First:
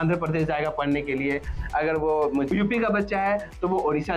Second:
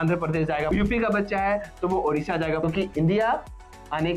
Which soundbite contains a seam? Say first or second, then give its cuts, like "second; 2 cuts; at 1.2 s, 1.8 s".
second; 2 cuts; at 0.7 s, 2.6 s